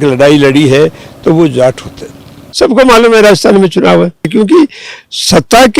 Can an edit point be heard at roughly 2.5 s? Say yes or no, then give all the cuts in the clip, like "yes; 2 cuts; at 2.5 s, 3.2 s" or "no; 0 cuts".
yes; 2 cuts; at 2.5 s, 4.3 s